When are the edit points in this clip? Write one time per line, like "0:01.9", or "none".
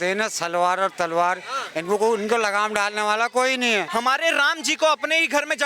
0:03.9